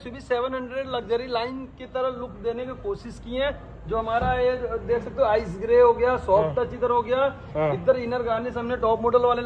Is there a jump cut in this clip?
no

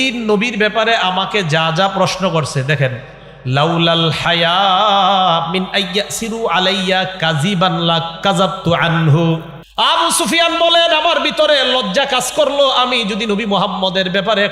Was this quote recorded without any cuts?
no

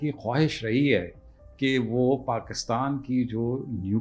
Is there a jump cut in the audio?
no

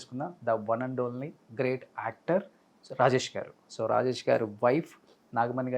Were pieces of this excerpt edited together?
yes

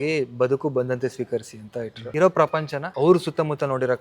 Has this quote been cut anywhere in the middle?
yes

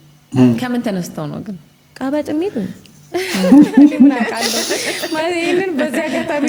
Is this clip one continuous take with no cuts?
yes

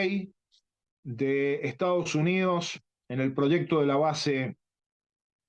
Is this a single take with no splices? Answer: yes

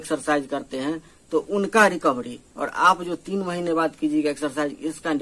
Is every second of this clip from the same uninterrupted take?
yes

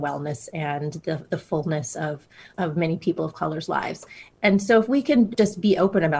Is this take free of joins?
no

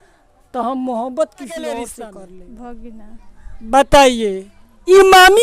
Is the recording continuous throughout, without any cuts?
no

